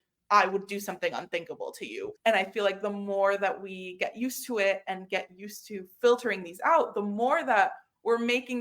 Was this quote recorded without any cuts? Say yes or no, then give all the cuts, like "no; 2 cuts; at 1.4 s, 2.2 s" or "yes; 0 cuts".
no; 1 cut; at 2.1 s